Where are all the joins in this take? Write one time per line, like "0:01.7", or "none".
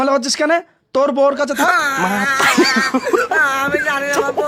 none